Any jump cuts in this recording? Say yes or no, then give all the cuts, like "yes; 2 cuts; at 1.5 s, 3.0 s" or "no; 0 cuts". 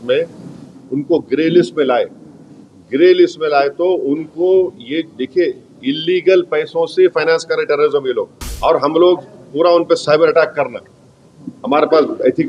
yes; 1 cut; at 8.4 s